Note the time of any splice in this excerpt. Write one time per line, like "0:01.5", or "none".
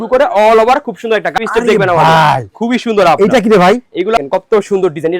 0:01.4
0:04.2